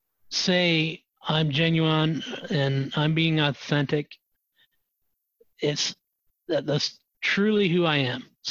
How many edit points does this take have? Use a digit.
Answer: 0